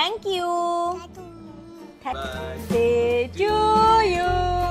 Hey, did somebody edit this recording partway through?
yes; 1 cut; at 2.1 s

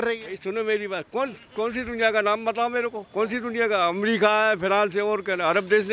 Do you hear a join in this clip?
no; 0 cuts

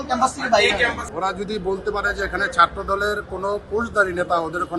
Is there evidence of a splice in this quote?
yes; 1 cut; at 1.0 s

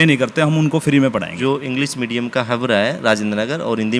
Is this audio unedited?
no; 1 cut; at 1.4 s

